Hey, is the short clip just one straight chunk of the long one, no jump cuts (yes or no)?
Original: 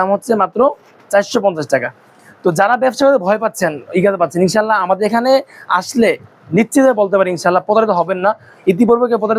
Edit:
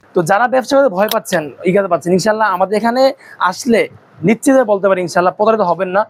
yes